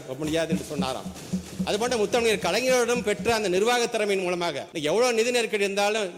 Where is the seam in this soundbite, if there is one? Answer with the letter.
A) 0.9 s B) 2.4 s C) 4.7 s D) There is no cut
C